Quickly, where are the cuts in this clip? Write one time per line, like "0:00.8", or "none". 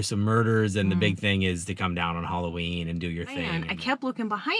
0:03.6